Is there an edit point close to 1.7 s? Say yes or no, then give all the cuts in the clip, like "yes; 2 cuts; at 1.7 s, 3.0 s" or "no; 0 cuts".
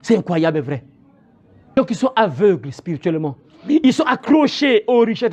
yes; 1 cut; at 1.7 s